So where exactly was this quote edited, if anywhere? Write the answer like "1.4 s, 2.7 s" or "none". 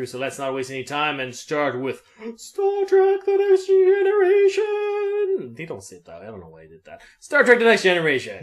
4.3 s